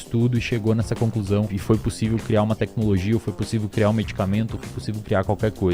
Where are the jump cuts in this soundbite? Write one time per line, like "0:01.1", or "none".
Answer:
0:01.5